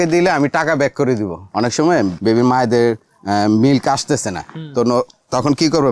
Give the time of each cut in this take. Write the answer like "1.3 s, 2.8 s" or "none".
1.5 s